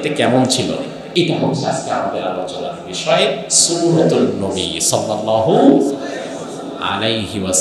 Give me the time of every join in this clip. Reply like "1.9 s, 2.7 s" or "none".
1.0 s